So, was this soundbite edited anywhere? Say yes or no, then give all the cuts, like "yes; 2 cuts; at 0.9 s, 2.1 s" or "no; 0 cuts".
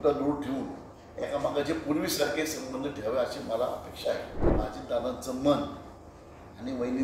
yes; 1 cut; at 4.4 s